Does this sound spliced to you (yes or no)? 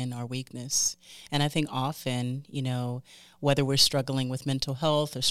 no